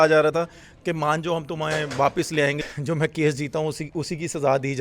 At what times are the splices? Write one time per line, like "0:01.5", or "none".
0:02.6